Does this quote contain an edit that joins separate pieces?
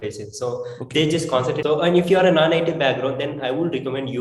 yes; 1 cut; at 1.6 s

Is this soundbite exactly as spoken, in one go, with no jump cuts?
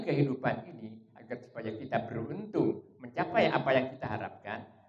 yes; 0 cuts

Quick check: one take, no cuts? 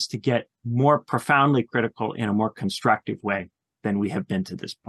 yes; 0 cuts

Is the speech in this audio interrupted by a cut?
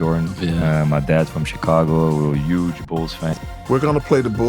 yes; 1 cut; at 3.3 s

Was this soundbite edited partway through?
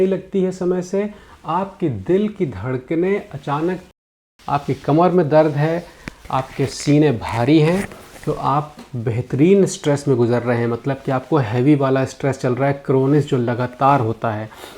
yes; 1 cut; at 4.0 s

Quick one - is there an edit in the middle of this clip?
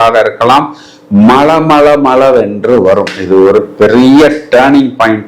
no; 0 cuts

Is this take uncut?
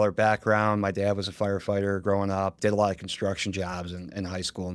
no; 1 cut; at 2.6 s

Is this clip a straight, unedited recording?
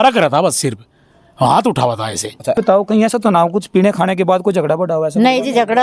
no; 1 cut; at 2.6 s

